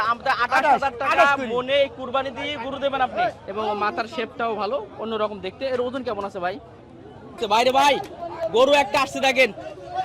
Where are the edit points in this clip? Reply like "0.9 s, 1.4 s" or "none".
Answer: 3.4 s, 7.4 s